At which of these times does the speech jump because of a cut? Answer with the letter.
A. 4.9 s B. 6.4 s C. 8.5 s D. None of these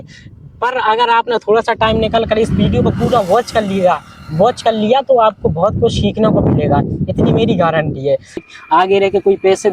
C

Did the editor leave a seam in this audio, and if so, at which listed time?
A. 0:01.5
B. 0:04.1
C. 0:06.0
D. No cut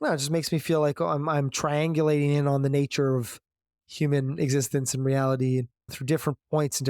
C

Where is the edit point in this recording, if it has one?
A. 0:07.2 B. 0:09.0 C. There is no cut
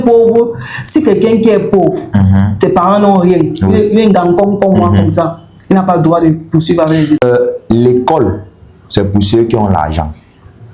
A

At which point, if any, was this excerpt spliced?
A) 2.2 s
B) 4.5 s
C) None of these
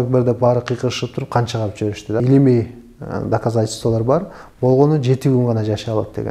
A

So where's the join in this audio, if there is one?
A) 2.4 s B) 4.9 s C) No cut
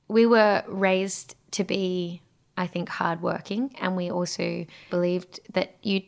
B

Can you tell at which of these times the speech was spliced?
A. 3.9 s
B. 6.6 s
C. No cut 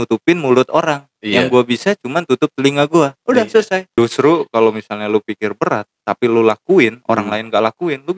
A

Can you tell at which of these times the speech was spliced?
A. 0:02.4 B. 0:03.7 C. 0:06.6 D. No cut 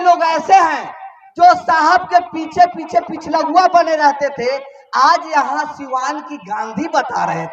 D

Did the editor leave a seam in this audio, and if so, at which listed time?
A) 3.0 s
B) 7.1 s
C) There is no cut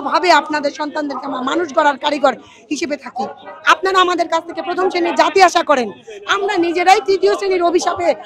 C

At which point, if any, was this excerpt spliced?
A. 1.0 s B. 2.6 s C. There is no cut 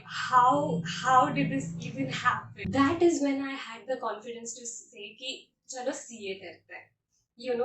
B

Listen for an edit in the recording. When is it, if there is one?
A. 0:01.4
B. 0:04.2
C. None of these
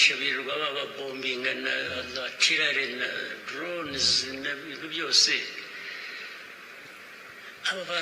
C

